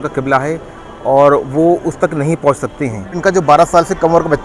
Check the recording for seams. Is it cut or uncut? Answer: cut